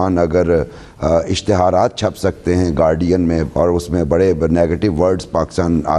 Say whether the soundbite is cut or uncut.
cut